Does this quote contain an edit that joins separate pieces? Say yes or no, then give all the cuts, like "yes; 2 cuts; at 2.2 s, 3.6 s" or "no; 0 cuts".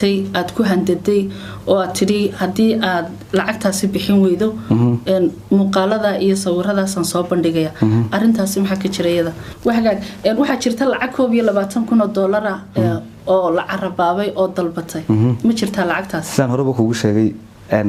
yes; 1 cut; at 9.4 s